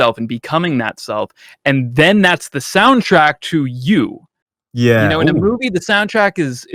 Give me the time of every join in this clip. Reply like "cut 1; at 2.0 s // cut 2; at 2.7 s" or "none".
none